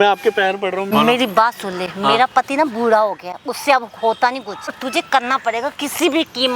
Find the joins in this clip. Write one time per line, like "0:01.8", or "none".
0:00.9
0:04.8